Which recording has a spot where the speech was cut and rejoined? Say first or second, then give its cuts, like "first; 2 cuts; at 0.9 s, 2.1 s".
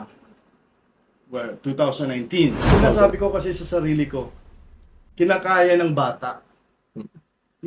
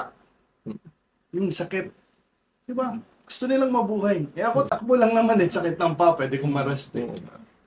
first; 1 cut; at 2.9 s